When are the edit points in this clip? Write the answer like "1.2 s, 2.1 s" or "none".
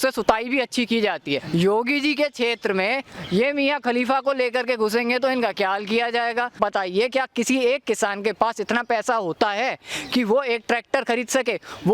1.4 s, 6.5 s

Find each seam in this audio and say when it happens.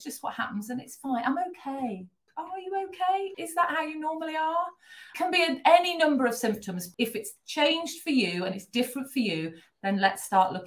2.3 s, 3.3 s, 5.1 s, 6.8 s

